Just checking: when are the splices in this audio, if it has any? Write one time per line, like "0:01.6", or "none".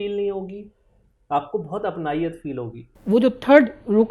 0:02.9